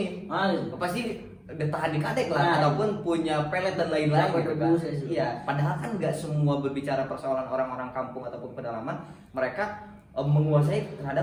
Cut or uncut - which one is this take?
uncut